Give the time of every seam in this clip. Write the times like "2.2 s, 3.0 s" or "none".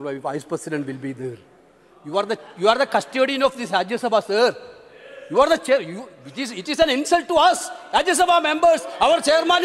none